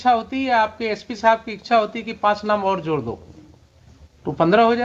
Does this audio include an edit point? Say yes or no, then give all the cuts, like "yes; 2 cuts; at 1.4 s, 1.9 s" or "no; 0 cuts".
no; 0 cuts